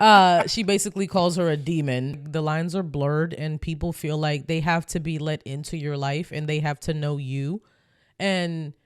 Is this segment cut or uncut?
cut